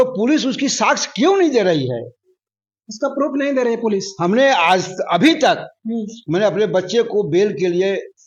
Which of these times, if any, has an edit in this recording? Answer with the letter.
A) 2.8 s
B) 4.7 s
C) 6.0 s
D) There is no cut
D